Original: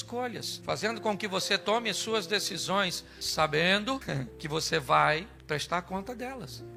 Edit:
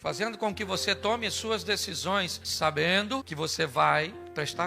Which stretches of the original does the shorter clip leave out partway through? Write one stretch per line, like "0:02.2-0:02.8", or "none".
0:03.0-0:03.2
0:04.0-0:04.4